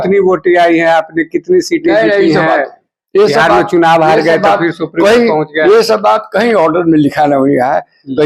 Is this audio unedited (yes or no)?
yes